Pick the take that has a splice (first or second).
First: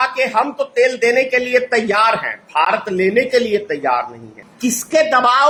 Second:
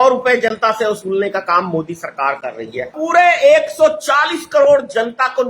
second